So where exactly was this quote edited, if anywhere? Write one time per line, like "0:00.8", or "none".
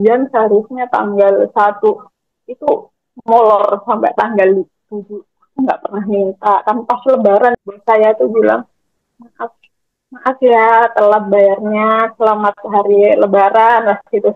0:07.6